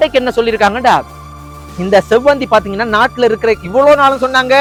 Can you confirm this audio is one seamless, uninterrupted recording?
yes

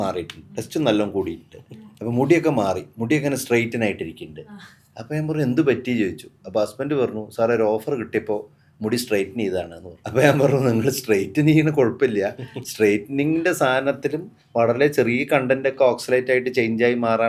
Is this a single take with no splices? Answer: yes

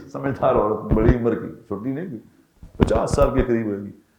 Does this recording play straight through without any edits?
yes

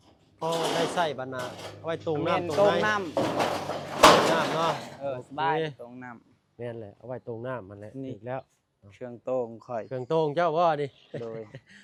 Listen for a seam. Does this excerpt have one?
no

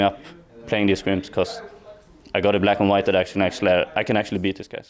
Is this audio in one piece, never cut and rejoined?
yes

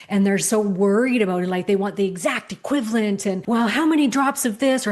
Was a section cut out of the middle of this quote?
yes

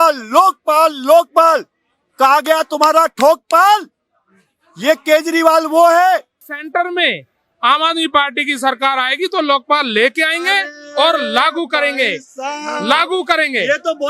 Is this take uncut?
no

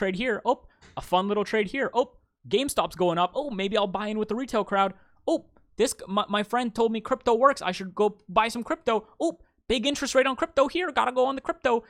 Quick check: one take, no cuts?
yes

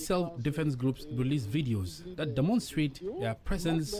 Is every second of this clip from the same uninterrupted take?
yes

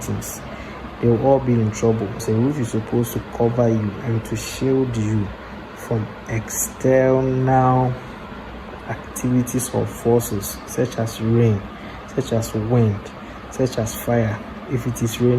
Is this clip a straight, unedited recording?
no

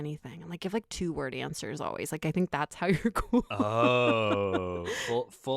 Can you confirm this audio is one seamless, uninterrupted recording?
yes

